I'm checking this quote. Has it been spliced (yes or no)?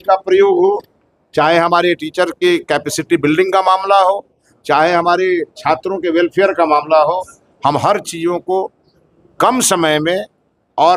no